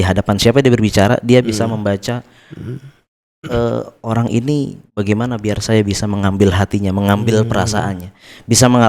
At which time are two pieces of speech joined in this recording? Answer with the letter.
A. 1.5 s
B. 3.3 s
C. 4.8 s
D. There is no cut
D